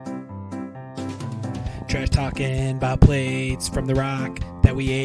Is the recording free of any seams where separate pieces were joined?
no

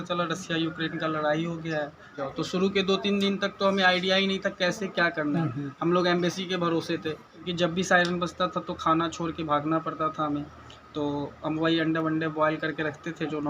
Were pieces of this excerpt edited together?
yes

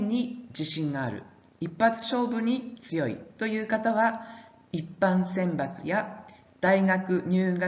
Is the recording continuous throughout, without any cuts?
yes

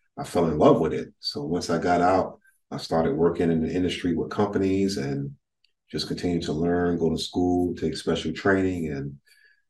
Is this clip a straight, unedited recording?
yes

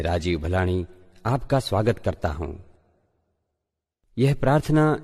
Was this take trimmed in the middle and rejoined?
no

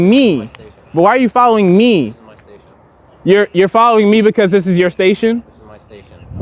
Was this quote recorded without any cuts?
yes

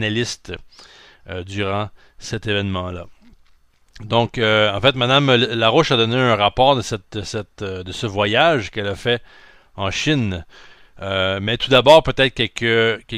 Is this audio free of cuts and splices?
no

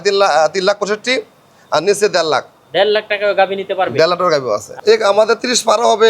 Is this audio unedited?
no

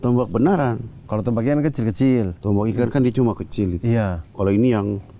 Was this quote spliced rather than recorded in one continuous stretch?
no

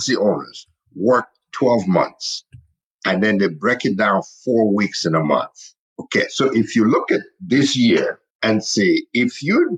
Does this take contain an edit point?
yes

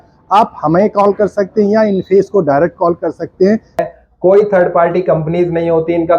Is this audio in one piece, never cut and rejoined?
no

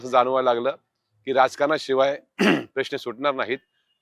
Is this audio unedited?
yes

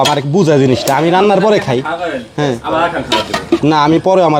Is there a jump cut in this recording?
no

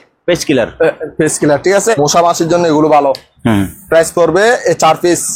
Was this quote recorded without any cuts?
no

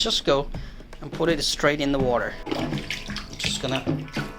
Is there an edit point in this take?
yes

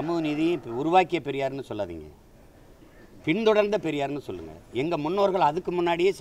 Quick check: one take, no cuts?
yes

